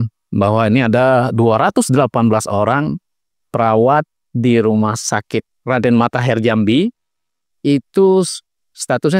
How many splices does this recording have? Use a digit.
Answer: 0